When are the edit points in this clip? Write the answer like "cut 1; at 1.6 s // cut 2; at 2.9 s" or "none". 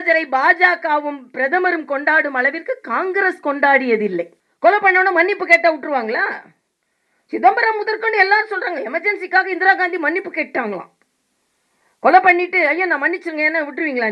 cut 1; at 4.4 s